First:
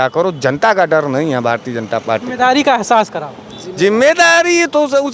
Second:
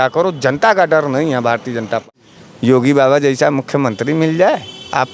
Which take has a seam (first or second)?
second